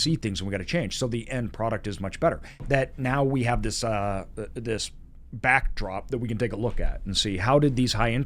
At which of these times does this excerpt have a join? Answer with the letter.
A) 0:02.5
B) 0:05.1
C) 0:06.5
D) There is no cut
A